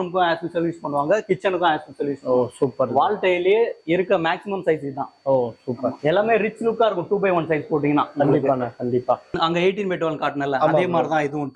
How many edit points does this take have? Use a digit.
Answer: 2